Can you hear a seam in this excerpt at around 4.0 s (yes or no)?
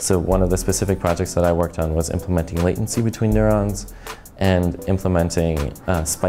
no